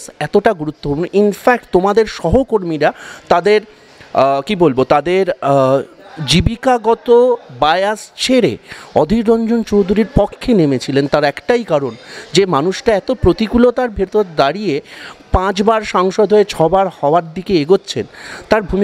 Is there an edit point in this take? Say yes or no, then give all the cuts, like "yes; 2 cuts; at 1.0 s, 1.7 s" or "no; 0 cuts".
no; 0 cuts